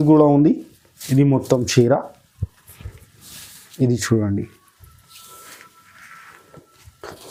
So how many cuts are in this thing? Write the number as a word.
zero